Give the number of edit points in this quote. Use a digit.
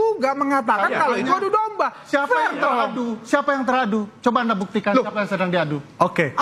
0